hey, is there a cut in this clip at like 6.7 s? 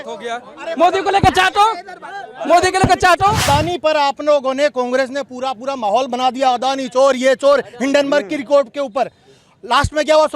no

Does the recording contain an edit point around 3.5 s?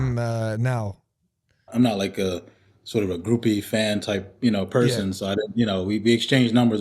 no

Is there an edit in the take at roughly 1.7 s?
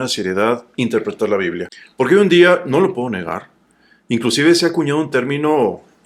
yes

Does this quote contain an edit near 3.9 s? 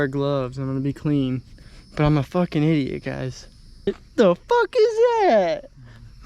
yes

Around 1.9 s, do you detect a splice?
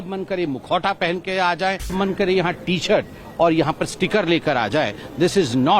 yes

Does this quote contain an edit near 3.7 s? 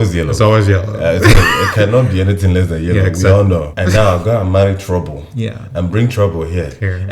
yes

